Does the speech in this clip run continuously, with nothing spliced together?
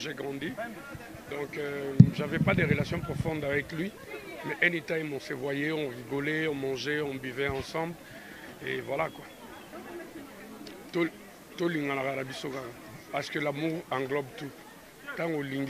no; 1 cut; at 9.7 s

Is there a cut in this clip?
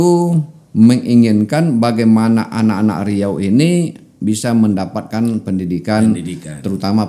no; 0 cuts

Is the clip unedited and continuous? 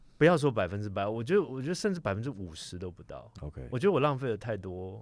yes; 0 cuts

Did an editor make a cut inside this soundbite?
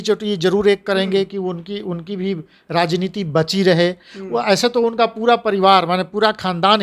no; 0 cuts

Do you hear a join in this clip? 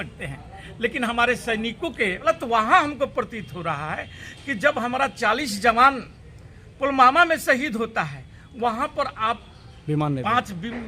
yes; 1 cut; at 2.2 s

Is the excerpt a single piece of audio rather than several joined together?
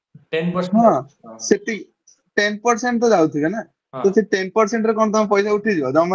yes; 0 cuts

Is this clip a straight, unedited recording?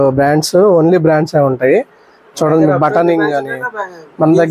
yes; 0 cuts

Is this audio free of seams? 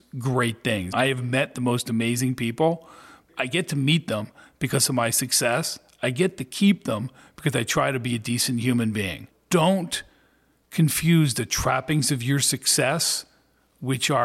no; 3 cuts; at 0.9 s, 3.2 s, 9.3 s

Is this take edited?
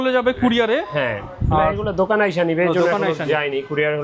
no; 0 cuts

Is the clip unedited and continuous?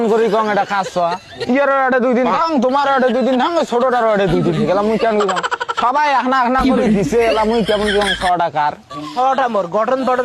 yes; 0 cuts

